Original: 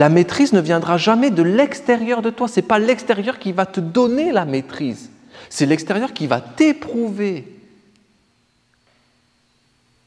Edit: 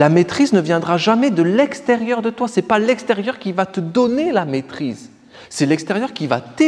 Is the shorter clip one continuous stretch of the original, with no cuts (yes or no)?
yes